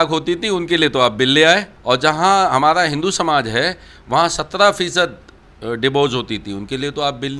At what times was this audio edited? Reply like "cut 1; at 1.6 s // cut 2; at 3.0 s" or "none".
cut 1; at 1.7 s

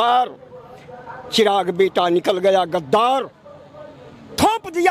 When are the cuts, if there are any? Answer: none

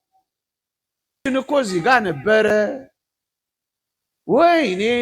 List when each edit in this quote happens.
cut 1; at 1.3 s

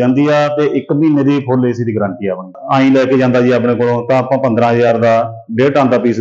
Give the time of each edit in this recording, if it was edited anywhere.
cut 1; at 2.5 s

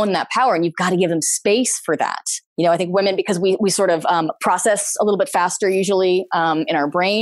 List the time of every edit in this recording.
cut 1; at 2.6 s

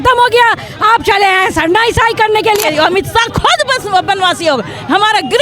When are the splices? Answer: cut 1; at 2.7 s

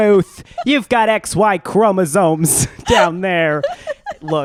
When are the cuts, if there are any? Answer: none

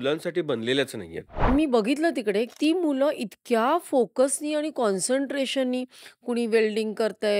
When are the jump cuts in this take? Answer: cut 1; at 1.5 s // cut 2; at 2.5 s

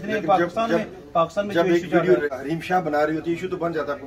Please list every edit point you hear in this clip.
cut 1; at 2.3 s

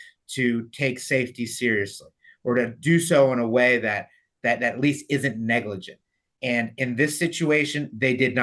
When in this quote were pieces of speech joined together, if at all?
none

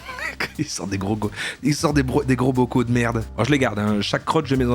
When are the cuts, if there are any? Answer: cut 1; at 3.3 s

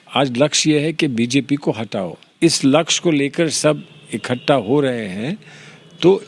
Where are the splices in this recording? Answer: cut 1; at 2.3 s

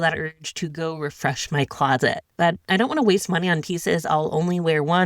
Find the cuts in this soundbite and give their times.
cut 1; at 2.2 s

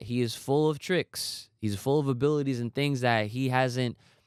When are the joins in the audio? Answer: none

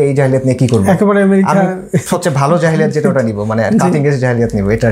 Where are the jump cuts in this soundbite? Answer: none

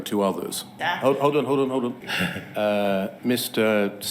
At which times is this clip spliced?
cut 1; at 0.8 s // cut 2; at 2.1 s

